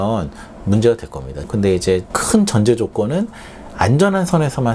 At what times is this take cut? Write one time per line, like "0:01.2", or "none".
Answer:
0:01.5